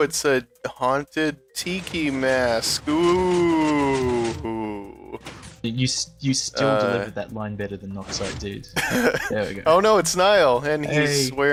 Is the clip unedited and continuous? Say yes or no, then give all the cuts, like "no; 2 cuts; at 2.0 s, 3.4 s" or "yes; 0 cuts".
yes; 0 cuts